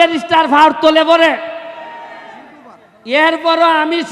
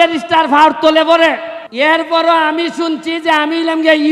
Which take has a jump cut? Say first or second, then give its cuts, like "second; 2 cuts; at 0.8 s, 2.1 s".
second; 1 cut; at 1.6 s